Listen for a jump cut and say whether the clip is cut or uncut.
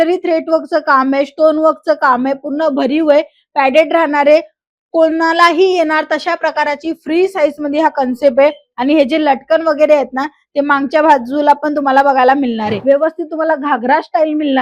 cut